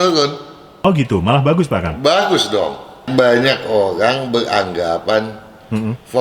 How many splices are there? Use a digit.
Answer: 1